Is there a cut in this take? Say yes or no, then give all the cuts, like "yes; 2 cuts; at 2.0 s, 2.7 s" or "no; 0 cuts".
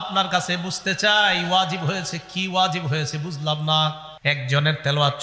yes; 1 cut; at 4.1 s